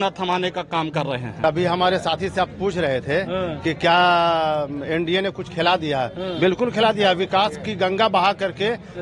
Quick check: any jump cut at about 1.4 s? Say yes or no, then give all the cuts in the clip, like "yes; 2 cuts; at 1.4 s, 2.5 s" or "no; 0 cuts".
yes; 1 cut; at 1.4 s